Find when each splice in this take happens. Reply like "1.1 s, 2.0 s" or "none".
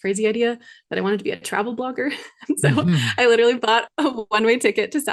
none